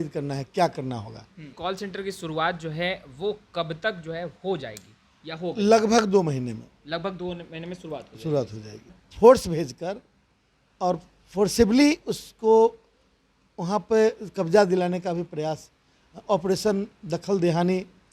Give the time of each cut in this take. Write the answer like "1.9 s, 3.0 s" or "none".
1.5 s, 9.0 s